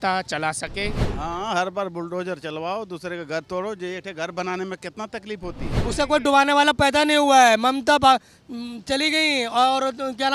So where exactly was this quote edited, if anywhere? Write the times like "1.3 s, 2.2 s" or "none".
1.1 s, 5.9 s